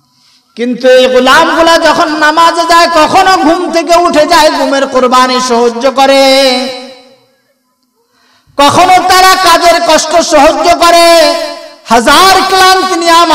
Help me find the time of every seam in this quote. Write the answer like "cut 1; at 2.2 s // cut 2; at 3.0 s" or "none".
none

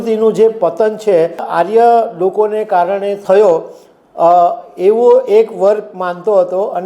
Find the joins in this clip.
cut 1; at 1.5 s // cut 2; at 3.2 s

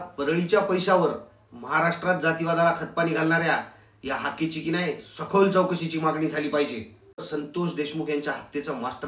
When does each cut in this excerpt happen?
cut 1; at 7.2 s

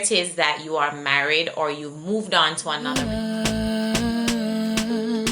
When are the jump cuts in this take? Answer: cut 1; at 2.8 s

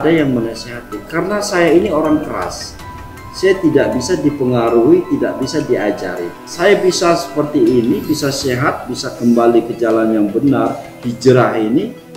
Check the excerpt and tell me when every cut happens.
cut 1; at 6.4 s

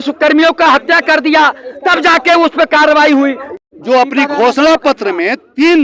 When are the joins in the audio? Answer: cut 1; at 3.5 s

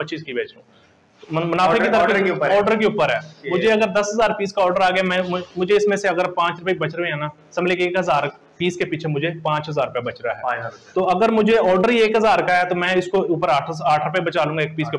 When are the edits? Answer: none

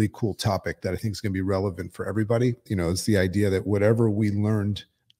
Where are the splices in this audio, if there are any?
cut 1; at 2.6 s

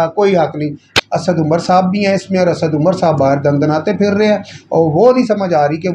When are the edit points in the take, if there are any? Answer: cut 1; at 0.9 s

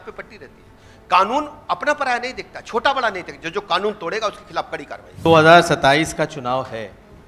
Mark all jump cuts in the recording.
cut 1; at 5.3 s

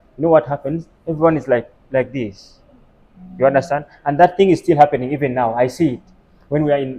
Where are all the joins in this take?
none

